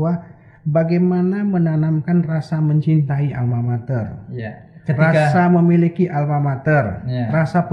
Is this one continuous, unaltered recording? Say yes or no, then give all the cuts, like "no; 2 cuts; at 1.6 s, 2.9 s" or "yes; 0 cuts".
yes; 0 cuts